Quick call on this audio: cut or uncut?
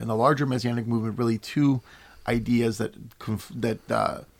uncut